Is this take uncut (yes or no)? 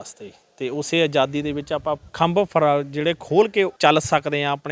no